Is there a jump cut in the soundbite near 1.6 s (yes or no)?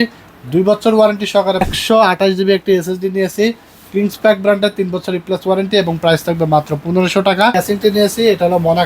yes